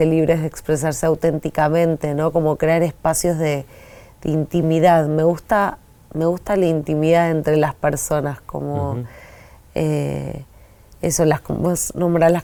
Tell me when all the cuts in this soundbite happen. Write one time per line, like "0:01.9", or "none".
none